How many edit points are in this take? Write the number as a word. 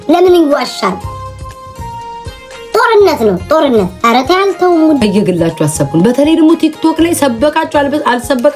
one